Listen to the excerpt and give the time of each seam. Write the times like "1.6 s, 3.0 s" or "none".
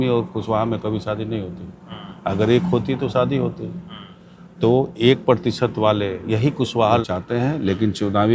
7.0 s